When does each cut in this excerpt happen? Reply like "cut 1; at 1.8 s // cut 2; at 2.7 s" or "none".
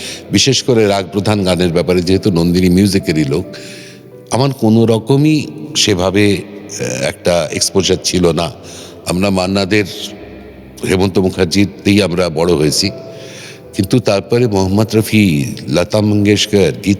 none